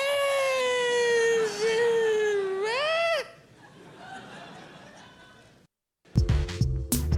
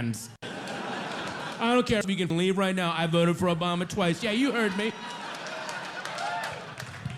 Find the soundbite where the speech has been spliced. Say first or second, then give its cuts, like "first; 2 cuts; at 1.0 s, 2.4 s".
first; 1 cut; at 6.1 s